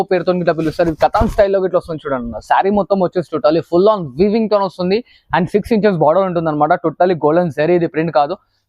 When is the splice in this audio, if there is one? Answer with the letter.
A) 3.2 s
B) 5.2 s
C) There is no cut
C